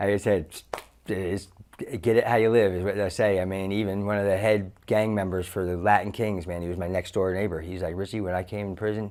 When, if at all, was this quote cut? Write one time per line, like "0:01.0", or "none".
none